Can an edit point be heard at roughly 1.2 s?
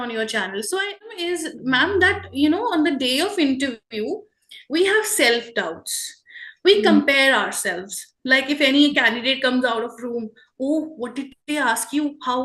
yes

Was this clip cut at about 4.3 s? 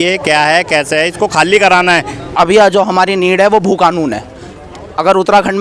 no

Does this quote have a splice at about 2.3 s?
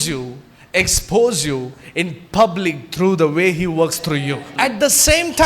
no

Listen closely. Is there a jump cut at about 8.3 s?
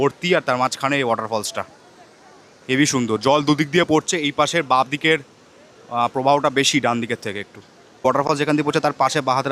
yes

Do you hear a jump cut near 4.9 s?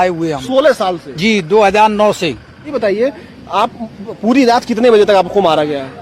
no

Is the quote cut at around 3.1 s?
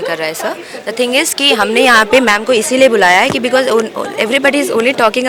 no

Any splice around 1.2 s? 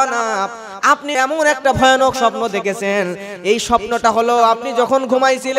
yes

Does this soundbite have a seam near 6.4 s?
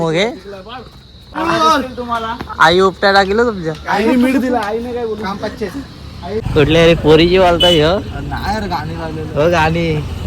yes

